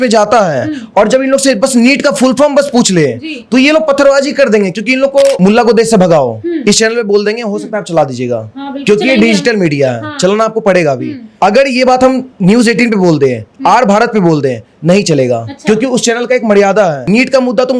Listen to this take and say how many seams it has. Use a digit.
3